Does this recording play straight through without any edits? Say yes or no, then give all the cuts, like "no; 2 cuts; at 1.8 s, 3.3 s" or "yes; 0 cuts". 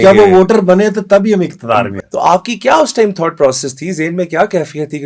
no; 1 cut; at 1.9 s